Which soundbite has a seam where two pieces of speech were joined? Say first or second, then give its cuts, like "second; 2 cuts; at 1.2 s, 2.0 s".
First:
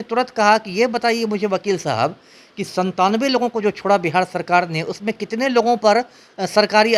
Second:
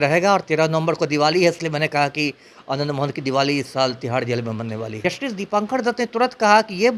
second; 1 cut; at 4.9 s